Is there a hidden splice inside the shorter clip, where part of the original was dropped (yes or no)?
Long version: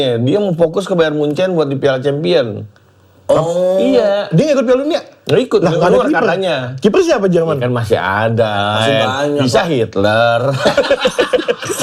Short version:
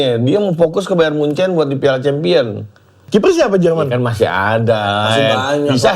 yes